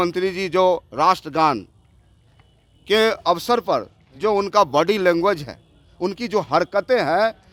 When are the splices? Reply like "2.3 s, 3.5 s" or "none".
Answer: none